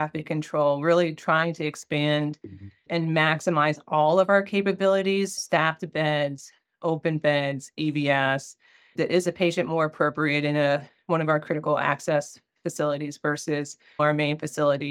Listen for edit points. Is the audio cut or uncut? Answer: uncut